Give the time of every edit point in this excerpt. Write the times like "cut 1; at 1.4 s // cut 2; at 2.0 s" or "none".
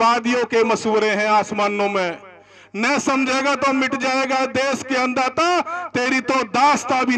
none